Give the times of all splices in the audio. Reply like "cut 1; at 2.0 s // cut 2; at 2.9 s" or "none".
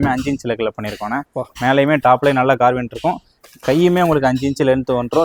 none